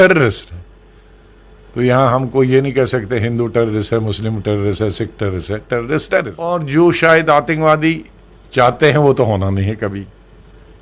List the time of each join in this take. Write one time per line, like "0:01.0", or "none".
0:06.6